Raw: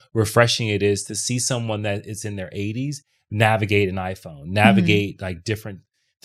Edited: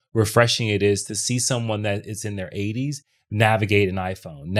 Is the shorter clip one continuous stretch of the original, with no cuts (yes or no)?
yes